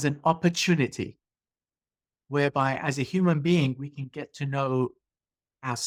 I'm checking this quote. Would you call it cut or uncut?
uncut